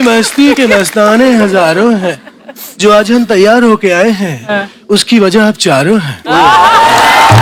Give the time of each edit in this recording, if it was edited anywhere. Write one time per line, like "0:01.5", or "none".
none

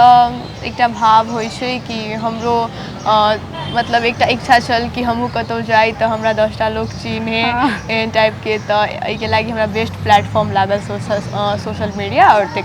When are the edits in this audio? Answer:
none

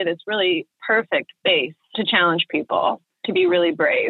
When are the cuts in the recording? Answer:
0:01.7
0:03.1

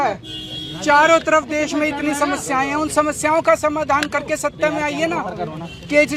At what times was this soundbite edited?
none

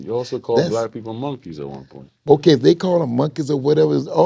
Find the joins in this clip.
0:02.1

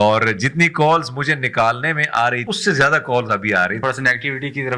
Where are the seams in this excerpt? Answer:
0:02.5
0:03.8

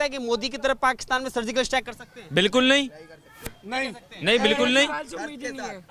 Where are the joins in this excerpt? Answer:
none

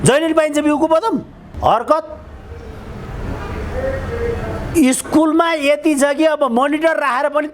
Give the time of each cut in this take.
0:01.5

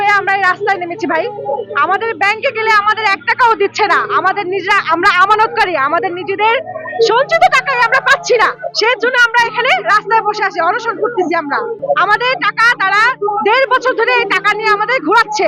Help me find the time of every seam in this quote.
none

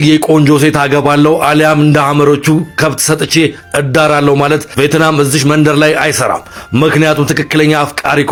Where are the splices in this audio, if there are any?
none

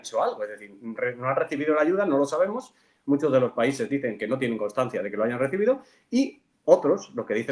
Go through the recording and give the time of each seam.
none

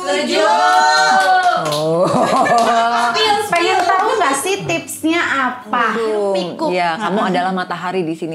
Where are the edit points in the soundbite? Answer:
0:05.9

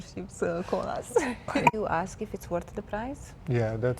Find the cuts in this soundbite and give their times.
0:01.6

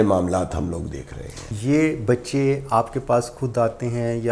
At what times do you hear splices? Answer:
0:01.5

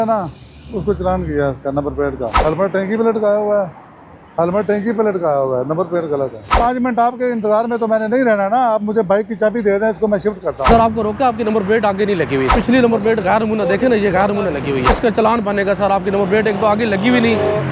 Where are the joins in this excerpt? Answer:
0:02.4
0:06.6
0:10.7
0:12.6
0:15.0

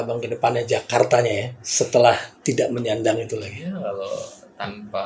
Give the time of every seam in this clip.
none

